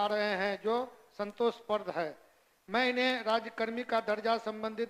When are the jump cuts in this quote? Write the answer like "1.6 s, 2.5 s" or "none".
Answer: none

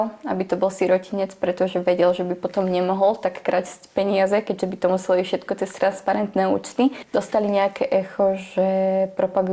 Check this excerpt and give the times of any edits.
7.0 s

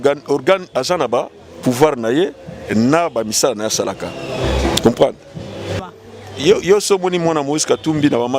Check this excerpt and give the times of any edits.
5.8 s

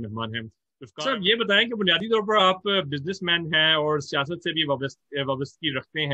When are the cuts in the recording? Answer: 1.0 s

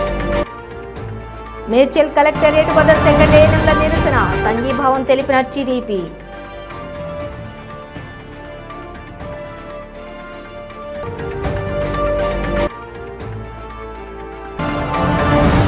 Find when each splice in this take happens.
1.5 s

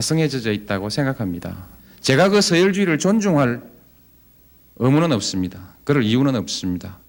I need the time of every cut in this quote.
none

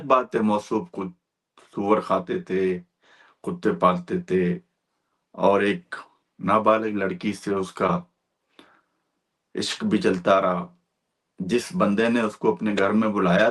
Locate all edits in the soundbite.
none

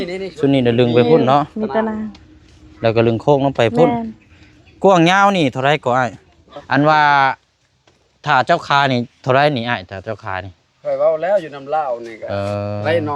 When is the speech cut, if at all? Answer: 6.5 s

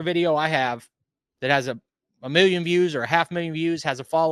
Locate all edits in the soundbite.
none

